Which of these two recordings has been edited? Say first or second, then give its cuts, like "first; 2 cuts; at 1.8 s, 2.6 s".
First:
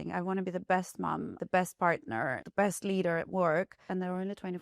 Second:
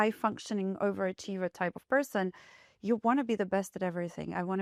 first; 3 cuts; at 1.3 s, 2.4 s, 3.8 s